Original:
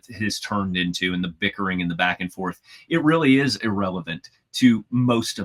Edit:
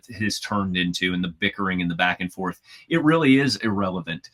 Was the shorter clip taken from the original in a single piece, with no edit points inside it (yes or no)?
yes